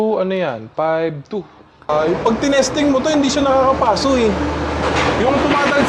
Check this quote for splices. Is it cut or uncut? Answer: cut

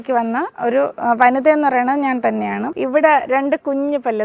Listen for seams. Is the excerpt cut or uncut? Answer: cut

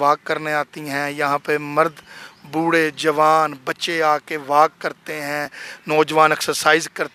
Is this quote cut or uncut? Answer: uncut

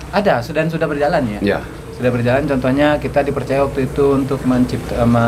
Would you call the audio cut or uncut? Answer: uncut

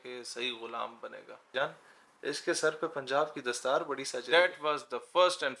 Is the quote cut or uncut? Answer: cut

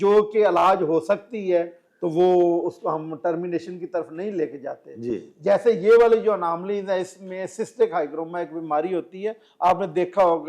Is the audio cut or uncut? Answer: uncut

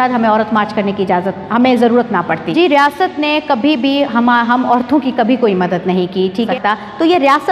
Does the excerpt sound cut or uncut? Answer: cut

